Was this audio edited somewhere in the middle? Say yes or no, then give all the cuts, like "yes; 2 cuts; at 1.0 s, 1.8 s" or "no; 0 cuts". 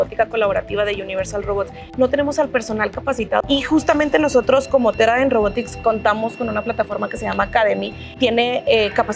yes; 3 cuts; at 1.8 s, 3.4 s, 8.0 s